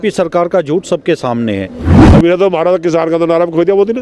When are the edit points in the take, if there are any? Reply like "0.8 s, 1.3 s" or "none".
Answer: 2.0 s